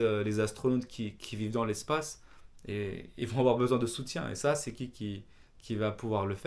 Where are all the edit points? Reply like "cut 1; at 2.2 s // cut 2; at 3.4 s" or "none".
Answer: none